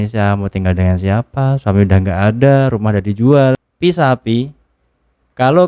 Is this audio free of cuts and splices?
no; 1 cut; at 3.7 s

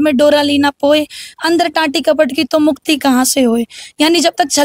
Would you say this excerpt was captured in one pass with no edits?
yes; 0 cuts

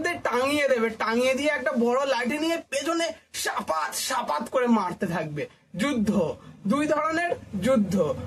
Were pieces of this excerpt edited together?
no; 0 cuts

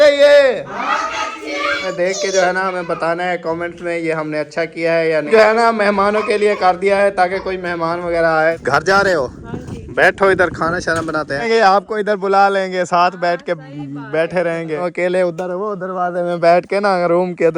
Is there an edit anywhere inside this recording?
yes; 5 cuts; at 1.9 s, 5.3 s, 8.6 s, 11.5 s, 14.8 s

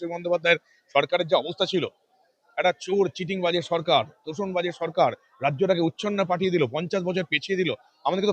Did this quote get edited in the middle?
no; 0 cuts

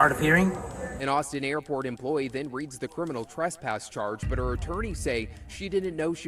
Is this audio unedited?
yes; 0 cuts

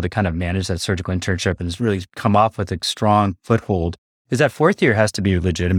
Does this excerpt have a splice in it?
yes; 1 cut; at 4.1 s

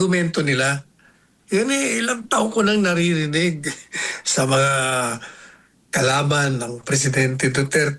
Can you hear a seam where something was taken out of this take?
no; 0 cuts

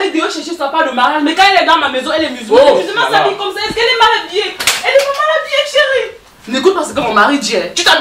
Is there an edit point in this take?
no; 0 cuts

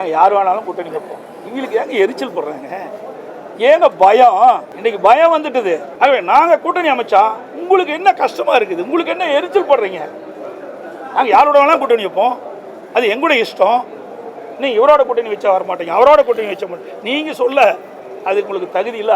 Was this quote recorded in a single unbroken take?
no; 2 cuts; at 4.7 s, 5.9 s

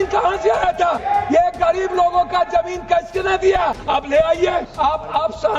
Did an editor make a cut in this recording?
yes; 3 cuts; at 1.0 s, 3.8 s, 4.7 s

